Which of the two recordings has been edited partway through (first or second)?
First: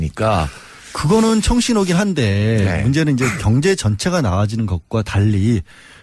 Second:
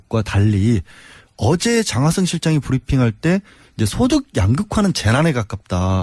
first